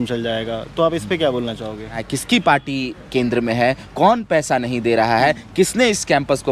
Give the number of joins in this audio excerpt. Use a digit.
1